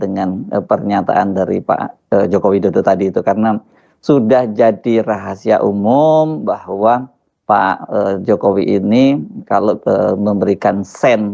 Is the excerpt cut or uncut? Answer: uncut